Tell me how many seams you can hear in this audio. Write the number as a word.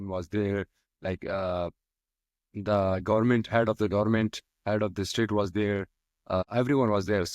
one